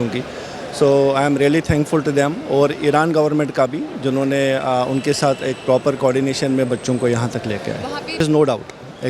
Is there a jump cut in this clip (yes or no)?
yes